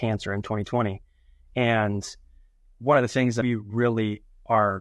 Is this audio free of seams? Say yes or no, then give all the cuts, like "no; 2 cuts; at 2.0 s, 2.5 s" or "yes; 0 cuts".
no; 1 cut; at 3.3 s